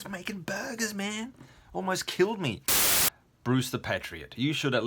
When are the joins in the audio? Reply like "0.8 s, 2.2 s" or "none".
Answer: 2.8 s